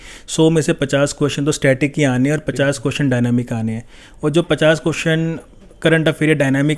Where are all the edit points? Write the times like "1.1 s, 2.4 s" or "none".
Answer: none